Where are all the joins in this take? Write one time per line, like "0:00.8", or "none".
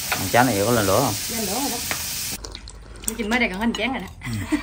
0:02.2